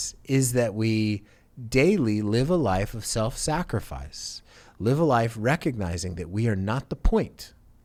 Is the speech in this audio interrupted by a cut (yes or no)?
no